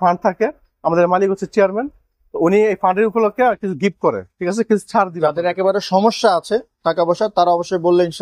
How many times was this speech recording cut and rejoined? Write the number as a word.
zero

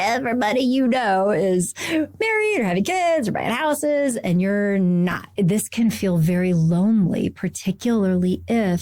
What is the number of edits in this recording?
one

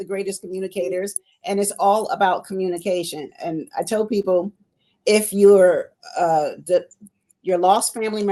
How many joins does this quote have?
zero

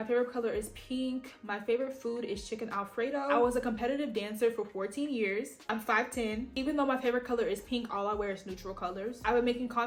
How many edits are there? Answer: zero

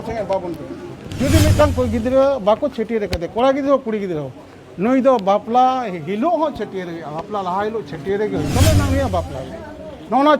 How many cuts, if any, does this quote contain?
two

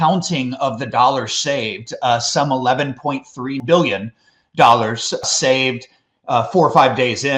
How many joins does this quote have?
two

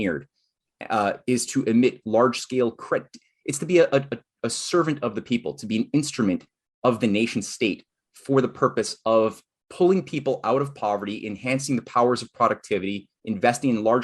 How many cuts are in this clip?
zero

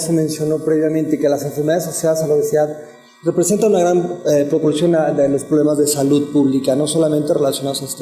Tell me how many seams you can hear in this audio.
one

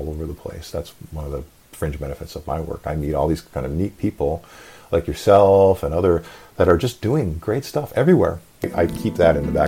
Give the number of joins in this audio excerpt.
one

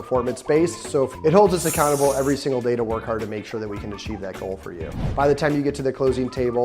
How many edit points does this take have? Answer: two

